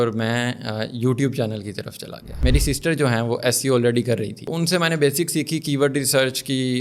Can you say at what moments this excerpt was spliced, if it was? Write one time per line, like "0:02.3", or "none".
0:02.4
0:04.5